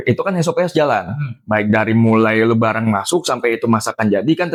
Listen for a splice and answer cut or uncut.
uncut